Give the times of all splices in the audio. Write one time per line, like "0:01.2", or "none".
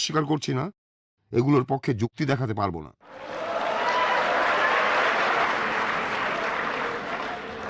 0:03.3
0:05.5

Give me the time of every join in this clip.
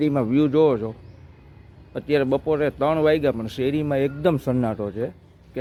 none

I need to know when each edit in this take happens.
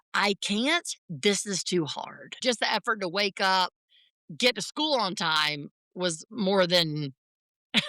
0:02.2

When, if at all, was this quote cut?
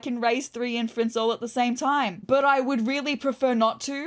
none

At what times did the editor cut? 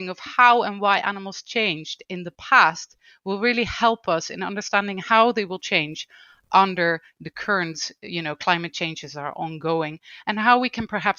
none

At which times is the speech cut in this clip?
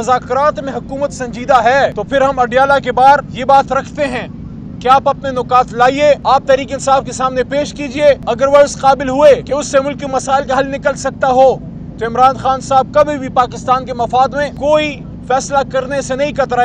0:02.0
0:03.3
0:06.2
0:08.2
0:09.4
0:14.5

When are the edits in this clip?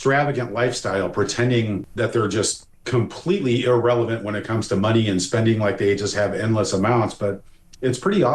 0:01.9

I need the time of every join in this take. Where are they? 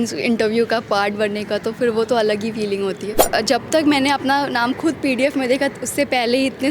0:03.3

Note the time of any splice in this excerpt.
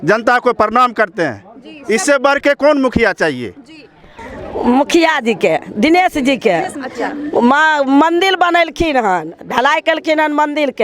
0:04.1

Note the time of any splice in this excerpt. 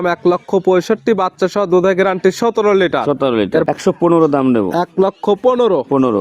0:03.6

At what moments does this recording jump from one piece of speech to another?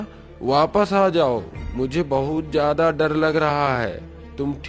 none

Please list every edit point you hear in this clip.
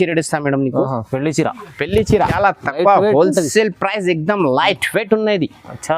0:02.3

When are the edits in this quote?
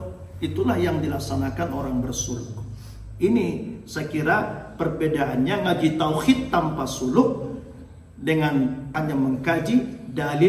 0:08.9

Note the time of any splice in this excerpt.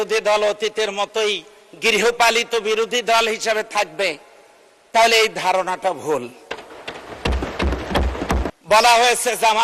0:08.5

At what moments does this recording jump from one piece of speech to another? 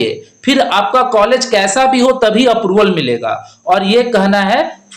none

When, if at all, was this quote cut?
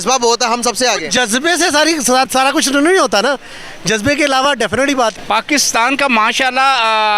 0:05.1

